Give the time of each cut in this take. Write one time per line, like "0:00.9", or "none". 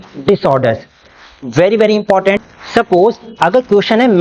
0:02.5